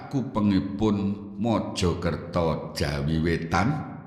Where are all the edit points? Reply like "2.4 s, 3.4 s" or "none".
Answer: 0.9 s

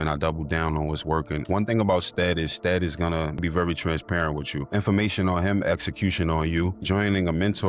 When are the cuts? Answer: 1.4 s, 3.4 s, 4.7 s, 6.8 s

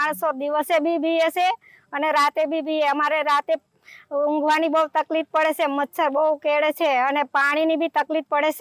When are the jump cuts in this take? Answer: none

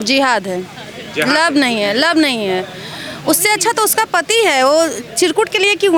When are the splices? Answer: none

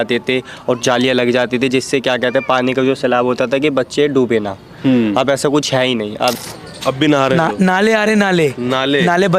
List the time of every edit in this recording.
6.4 s

